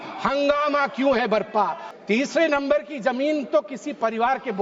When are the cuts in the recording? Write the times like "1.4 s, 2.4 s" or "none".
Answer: 1.8 s